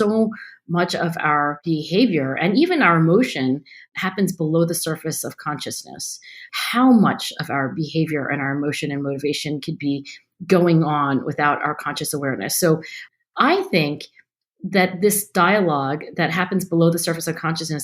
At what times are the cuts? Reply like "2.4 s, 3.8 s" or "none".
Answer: 1.6 s, 3.8 s, 6.4 s, 13.0 s